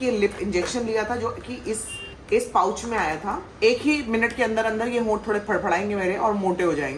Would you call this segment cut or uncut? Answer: cut